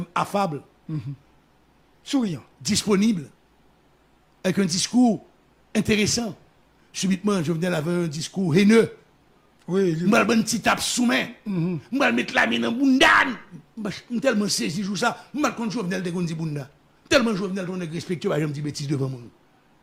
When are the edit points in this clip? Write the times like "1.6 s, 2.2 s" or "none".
none